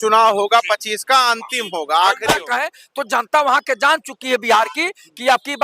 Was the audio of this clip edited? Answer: yes; 1 cut; at 2.4 s

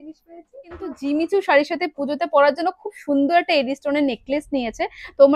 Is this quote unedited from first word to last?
no; 1 cut; at 0.9 s

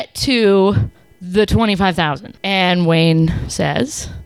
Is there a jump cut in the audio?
no; 0 cuts

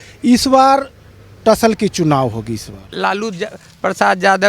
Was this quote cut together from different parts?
yes; 1 cut; at 2.9 s

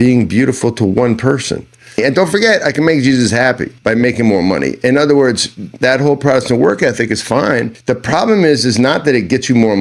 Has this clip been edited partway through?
yes; 3 cuts; at 2.0 s, 3.7 s, 7.7 s

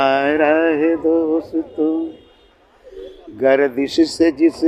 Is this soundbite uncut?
yes; 0 cuts

